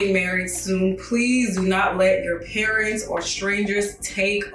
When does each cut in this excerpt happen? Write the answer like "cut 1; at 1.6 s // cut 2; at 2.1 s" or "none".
none